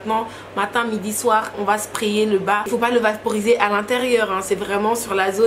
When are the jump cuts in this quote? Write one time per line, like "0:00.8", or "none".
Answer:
0:02.6

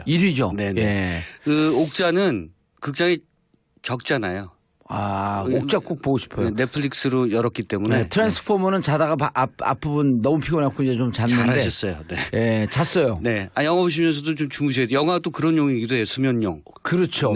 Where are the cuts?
none

